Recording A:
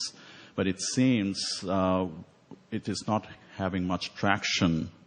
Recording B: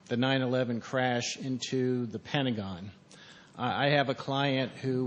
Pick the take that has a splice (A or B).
B